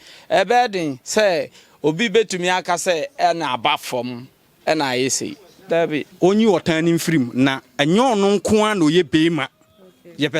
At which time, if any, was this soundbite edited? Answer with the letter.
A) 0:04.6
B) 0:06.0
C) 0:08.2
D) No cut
B